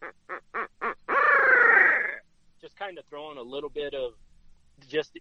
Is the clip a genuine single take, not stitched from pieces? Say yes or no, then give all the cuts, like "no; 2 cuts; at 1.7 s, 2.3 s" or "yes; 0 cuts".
yes; 0 cuts